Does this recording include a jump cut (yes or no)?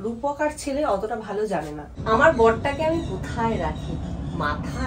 yes